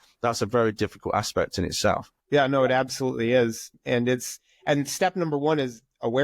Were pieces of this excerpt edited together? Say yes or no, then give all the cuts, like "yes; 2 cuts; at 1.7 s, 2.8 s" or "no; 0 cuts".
yes; 2 cuts; at 2.1 s, 3.7 s